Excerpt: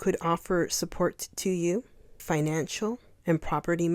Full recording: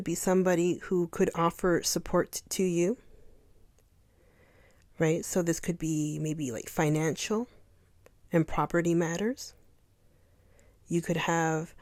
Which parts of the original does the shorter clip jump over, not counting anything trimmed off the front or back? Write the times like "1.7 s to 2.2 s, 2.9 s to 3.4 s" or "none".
3.3 s to 6.6 s, 7.6 s to 8.2 s